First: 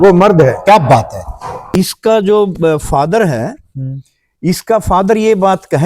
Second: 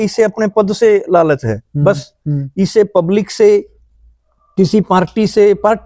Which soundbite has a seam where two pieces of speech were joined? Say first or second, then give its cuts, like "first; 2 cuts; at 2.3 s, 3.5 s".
first; 1 cut; at 1.7 s